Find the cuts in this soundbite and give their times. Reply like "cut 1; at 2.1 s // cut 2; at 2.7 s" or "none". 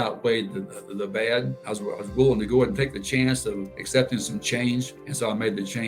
cut 1; at 1.6 s // cut 2; at 3.7 s // cut 3; at 5.0 s